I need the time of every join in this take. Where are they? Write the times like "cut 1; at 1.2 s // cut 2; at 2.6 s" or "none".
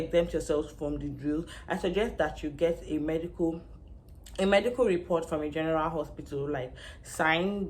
none